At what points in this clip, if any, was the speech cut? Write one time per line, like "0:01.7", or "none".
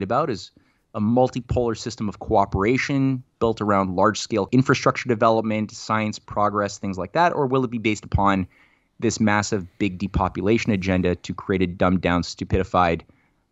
0:04.5